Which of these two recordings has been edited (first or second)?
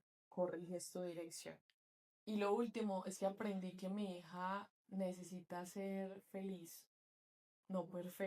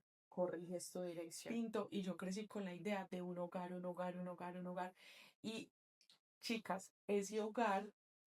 second